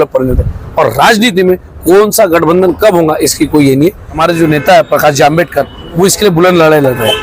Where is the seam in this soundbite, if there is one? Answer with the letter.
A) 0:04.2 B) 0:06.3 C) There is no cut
A